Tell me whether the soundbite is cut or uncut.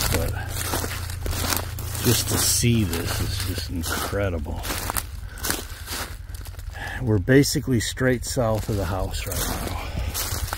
uncut